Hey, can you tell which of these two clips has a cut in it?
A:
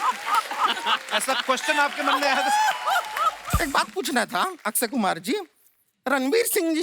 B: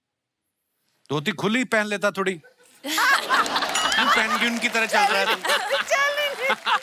A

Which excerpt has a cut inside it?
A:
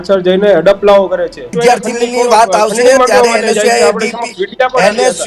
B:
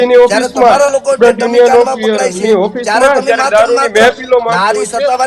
A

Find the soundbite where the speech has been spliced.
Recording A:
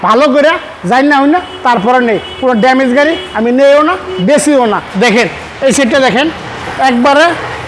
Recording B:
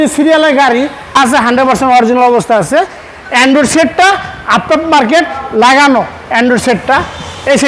B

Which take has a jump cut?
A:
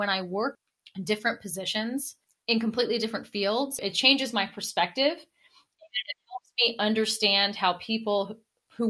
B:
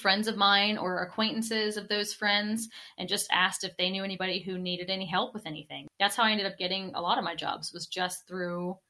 B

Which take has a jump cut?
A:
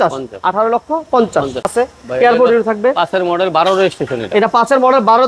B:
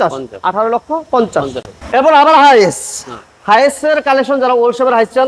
A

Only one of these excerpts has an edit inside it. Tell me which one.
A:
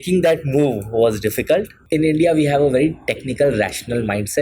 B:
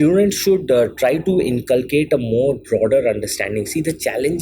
A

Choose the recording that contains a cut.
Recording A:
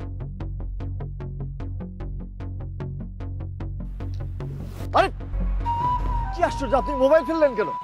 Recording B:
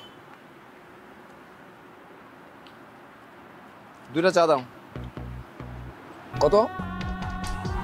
B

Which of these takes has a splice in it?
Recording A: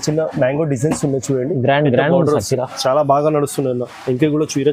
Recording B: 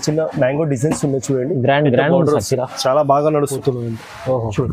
B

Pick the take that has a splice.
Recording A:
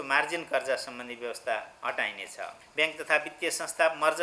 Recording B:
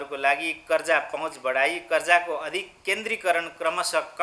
A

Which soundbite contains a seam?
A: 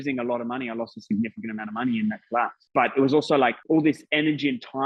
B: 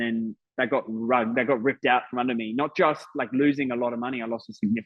A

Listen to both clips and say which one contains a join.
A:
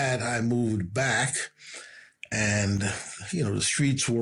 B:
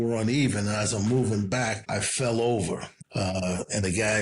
B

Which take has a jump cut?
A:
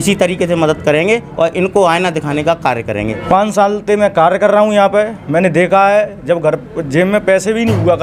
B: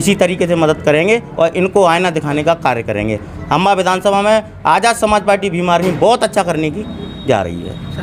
A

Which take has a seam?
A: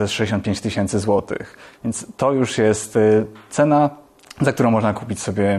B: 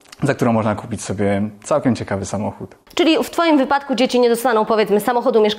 B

